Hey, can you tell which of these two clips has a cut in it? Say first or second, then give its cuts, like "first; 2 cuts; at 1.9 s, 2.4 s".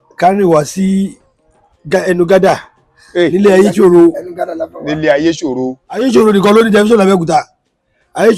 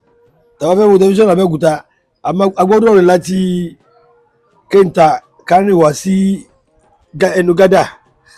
first; 1 cut; at 6.0 s